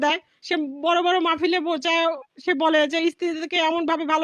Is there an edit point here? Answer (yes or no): no